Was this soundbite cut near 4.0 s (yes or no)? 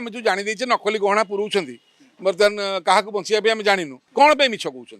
yes